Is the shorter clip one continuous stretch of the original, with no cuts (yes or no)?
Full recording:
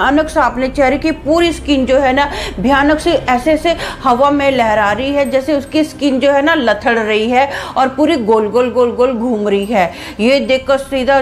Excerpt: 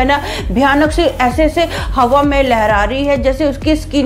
yes